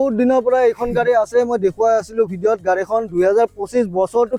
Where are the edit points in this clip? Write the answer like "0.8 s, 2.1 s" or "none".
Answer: none

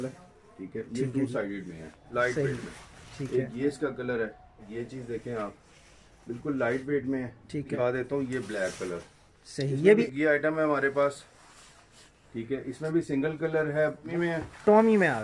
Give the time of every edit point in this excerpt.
2.0 s, 4.7 s, 7.8 s, 10.1 s, 14.1 s

